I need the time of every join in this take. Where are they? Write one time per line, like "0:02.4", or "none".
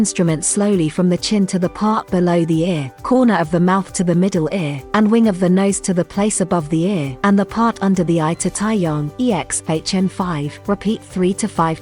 0:02.9
0:04.8
0:07.1
0:09.1
0:10.5